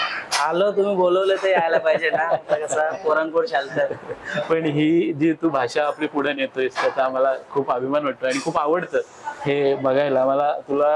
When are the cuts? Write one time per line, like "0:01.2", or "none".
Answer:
none